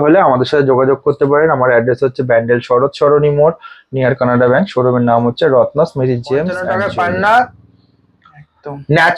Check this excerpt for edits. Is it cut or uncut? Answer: cut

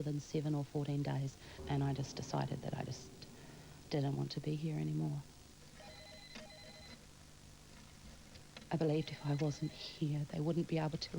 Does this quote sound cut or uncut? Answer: cut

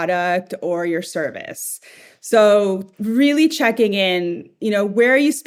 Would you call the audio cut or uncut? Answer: uncut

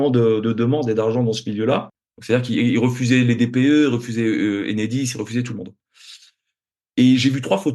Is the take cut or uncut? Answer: cut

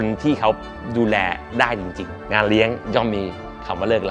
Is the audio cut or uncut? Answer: cut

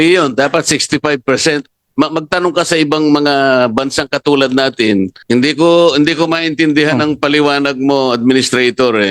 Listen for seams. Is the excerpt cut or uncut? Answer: cut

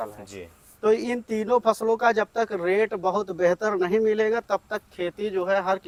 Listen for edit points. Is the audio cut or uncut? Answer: uncut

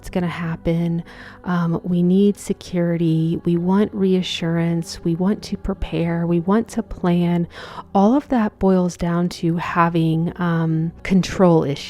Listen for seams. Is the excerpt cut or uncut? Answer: cut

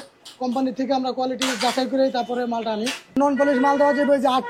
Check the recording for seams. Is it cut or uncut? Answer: cut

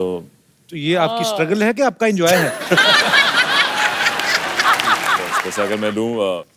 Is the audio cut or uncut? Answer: cut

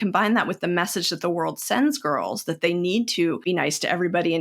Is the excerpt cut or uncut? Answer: cut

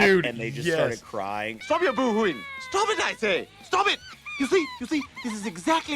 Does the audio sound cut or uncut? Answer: cut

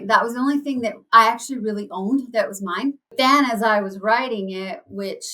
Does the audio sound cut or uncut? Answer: cut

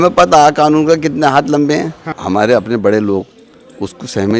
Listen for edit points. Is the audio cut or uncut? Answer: cut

